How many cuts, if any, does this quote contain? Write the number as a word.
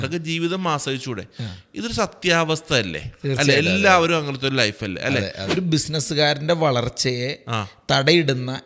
one